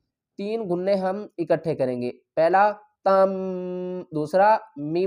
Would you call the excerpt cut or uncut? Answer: uncut